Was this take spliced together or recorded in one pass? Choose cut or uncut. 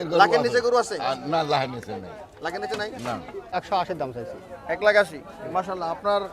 cut